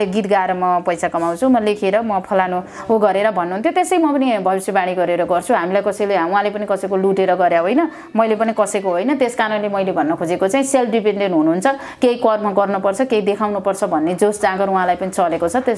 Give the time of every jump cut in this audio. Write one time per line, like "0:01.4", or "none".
none